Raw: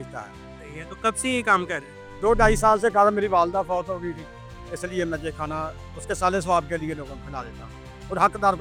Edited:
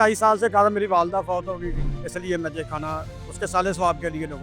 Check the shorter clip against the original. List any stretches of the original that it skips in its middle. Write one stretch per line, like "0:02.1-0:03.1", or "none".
0:04.3-0:04.6